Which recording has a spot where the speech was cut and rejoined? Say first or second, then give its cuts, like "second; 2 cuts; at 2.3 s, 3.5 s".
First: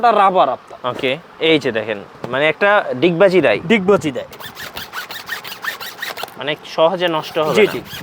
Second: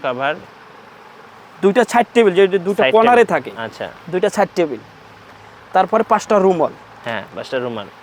first; 1 cut; at 4.3 s